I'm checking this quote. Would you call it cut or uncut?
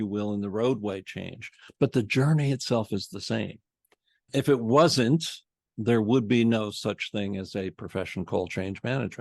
cut